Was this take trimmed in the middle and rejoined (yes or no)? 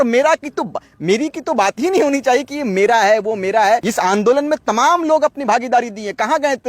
yes